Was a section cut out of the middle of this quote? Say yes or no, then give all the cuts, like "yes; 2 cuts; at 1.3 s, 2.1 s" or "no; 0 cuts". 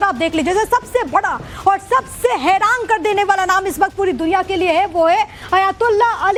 no; 0 cuts